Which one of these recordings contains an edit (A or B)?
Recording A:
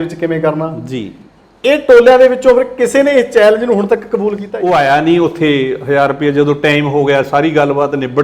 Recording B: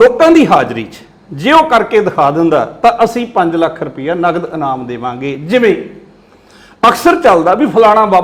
A